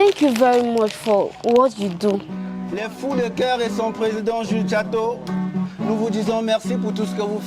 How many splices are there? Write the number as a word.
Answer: one